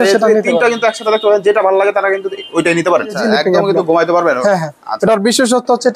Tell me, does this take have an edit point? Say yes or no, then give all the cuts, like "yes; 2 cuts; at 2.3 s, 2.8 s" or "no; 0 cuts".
yes; 1 cut; at 3.2 s